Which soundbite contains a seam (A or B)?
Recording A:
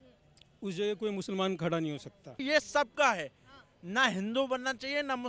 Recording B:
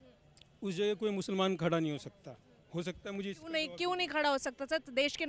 A